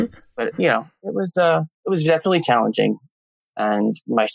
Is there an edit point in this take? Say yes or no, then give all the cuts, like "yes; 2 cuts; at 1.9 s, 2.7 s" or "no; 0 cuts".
yes; 1 cut; at 3.1 s